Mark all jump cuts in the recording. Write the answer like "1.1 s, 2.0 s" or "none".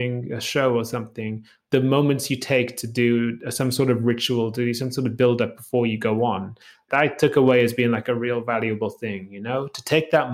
1.7 s, 6.8 s